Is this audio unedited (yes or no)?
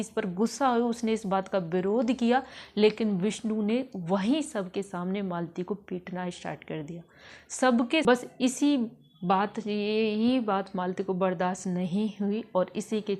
no